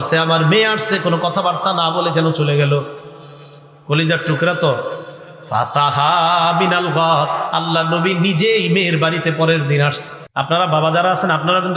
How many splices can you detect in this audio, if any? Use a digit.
1